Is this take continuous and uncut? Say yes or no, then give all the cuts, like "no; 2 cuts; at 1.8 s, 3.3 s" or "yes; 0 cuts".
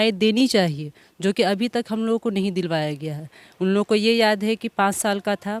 yes; 0 cuts